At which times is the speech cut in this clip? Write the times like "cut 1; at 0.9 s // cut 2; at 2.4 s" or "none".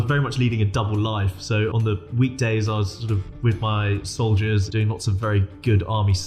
cut 1; at 1.8 s // cut 2; at 4.7 s